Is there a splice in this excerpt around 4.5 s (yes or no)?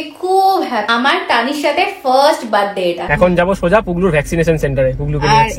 no